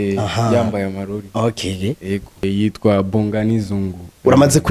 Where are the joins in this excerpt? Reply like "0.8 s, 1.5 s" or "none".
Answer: 2.4 s